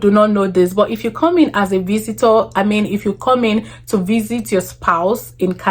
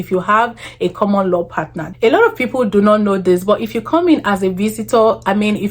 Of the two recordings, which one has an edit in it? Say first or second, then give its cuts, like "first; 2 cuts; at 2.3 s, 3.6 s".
second; 1 cut; at 1.8 s